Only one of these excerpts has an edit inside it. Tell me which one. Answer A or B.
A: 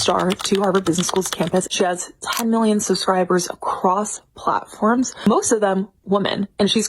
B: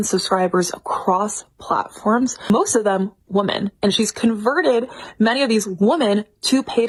A